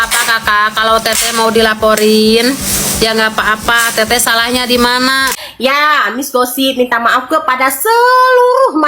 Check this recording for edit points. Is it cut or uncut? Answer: cut